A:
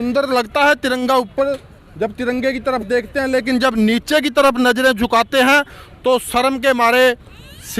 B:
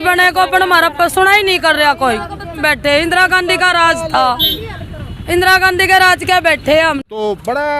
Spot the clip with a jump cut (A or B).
B